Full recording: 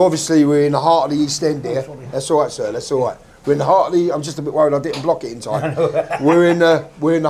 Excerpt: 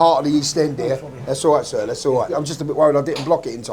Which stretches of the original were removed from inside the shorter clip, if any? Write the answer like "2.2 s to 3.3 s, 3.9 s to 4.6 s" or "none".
3.3 s to 4.2 s